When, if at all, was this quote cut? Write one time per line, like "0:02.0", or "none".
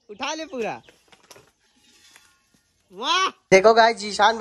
0:03.4